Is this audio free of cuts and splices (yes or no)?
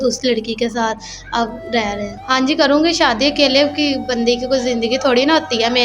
no